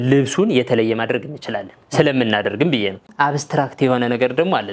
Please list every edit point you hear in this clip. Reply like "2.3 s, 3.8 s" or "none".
3.1 s